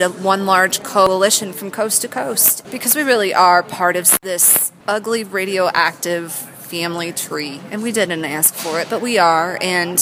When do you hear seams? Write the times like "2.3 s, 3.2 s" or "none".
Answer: 1.1 s, 2.5 s, 4.3 s